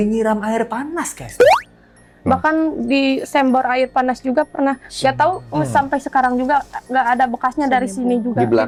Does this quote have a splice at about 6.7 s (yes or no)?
no